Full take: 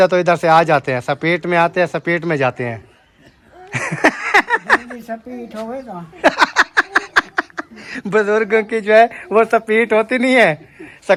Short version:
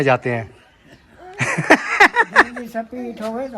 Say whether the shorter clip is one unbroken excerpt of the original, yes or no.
yes